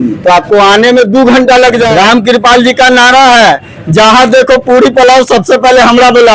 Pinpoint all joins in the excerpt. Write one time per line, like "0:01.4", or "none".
0:01.9